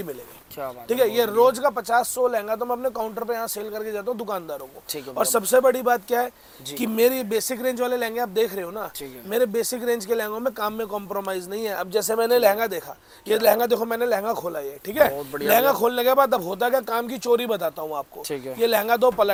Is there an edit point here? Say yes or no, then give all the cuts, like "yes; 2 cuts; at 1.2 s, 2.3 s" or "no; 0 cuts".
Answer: no; 0 cuts